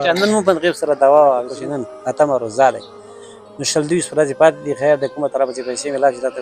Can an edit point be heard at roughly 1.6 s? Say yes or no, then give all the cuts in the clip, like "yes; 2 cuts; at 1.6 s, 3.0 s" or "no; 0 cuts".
yes; 1 cut; at 1.6 s